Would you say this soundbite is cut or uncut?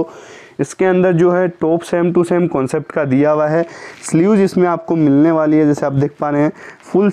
uncut